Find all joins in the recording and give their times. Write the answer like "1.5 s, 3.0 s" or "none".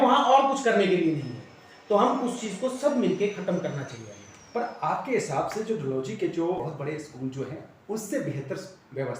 6.6 s